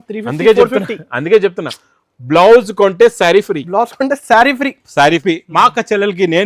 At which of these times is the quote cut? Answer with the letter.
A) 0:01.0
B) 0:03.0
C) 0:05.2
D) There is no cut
C